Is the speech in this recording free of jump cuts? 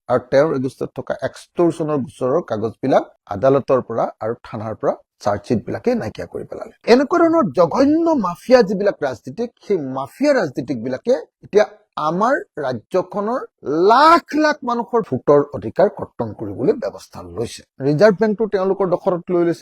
yes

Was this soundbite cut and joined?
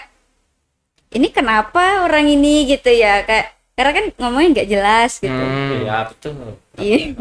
no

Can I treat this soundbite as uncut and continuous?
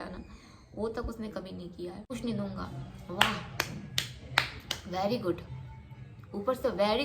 no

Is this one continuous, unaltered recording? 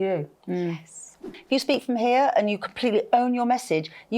no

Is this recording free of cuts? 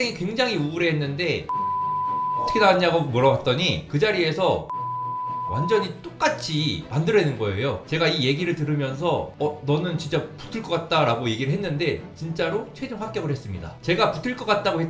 no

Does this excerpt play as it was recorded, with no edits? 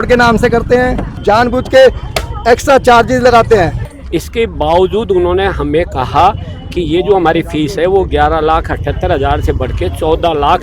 no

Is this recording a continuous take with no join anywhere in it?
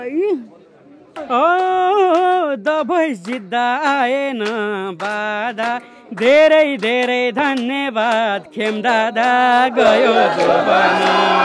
no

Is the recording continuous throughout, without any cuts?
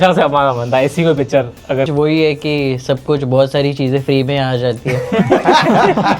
no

